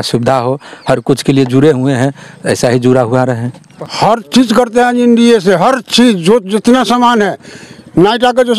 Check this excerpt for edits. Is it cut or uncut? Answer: cut